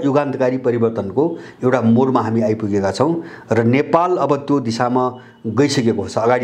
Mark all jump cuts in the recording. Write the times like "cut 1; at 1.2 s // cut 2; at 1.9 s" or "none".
none